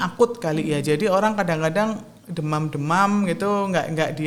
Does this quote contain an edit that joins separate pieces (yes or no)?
no